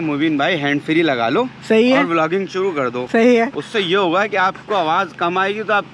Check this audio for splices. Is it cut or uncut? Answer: uncut